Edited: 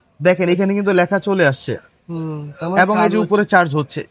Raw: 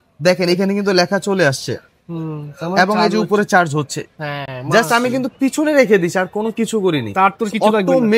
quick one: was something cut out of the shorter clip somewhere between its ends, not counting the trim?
no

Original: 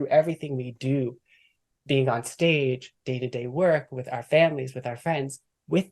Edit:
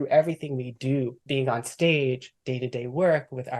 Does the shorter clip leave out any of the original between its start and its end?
yes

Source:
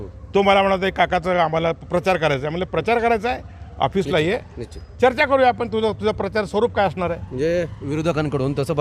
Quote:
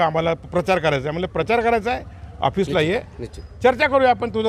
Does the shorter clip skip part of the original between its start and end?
no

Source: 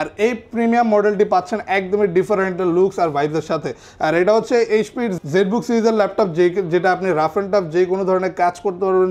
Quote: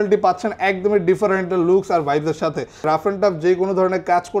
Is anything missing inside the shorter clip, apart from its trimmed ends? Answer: yes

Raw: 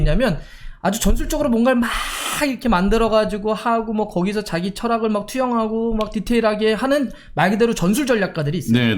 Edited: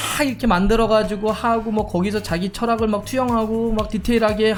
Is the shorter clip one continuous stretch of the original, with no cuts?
yes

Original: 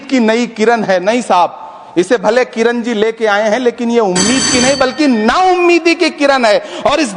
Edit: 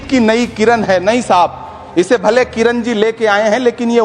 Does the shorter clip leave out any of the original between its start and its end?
no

